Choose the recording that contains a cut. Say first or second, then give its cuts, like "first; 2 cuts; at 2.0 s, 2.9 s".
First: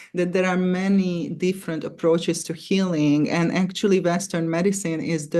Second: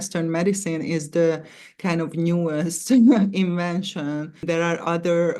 second; 1 cut; at 4.4 s